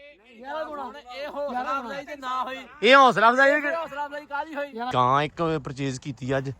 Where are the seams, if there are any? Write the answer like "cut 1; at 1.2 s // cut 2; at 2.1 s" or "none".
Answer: cut 1; at 4.9 s